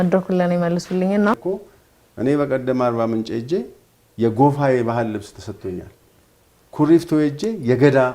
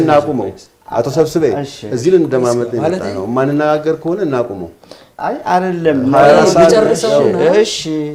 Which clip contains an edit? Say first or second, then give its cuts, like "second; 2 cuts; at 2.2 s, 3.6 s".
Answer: first; 1 cut; at 1.3 s